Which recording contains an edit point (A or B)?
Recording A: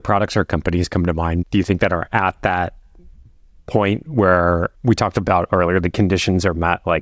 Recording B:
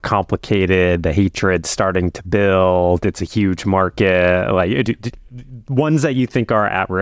A